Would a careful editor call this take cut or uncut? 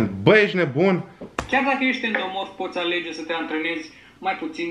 uncut